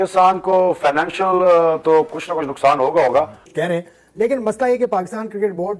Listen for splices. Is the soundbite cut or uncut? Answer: cut